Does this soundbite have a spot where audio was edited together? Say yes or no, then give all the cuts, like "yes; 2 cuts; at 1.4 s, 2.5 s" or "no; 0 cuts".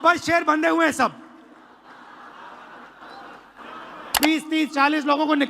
yes; 1 cut; at 4.2 s